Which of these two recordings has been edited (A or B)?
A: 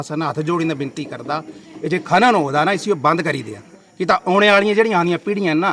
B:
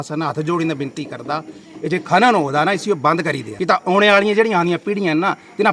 B